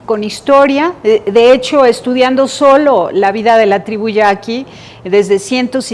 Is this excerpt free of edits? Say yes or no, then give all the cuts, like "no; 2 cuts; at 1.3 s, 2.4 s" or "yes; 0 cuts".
yes; 0 cuts